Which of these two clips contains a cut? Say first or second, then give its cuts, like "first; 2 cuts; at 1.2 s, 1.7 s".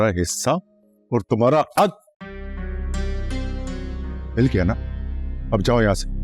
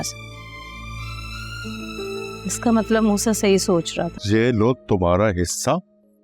second; 1 cut; at 4.2 s